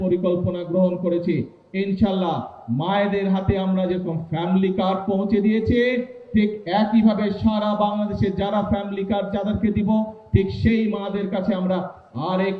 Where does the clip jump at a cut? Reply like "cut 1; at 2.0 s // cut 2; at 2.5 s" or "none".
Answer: none